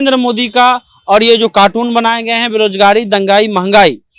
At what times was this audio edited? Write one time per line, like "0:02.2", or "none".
none